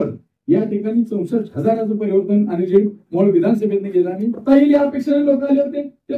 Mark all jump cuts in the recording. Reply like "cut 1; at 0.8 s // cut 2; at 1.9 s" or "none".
cut 1; at 4.4 s